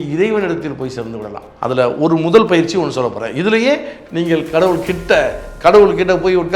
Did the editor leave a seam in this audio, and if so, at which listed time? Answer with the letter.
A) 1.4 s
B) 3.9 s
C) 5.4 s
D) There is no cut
A